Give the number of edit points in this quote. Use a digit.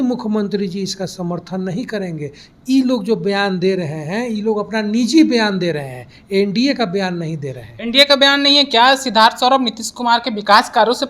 0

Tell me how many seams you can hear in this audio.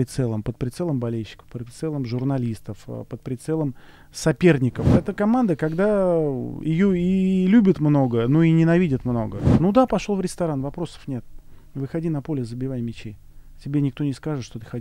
2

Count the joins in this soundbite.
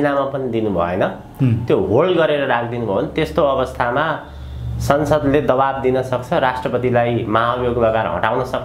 0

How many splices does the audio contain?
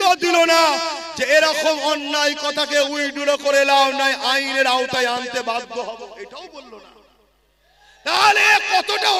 0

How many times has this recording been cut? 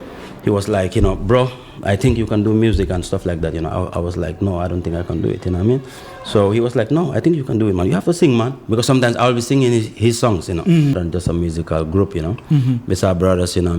1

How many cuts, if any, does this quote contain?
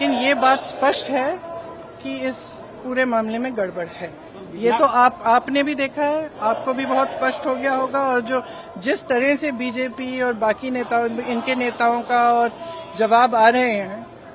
0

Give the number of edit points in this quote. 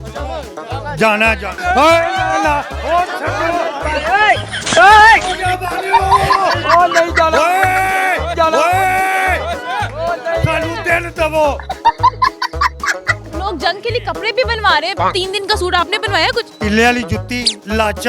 2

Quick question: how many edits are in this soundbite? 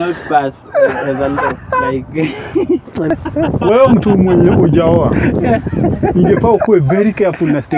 1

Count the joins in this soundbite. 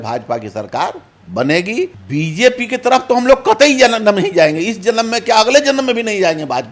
1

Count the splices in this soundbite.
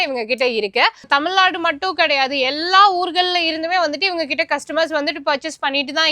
1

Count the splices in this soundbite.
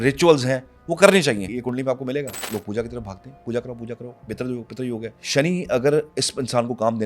3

